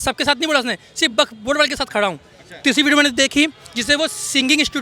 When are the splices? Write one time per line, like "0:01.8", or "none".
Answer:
none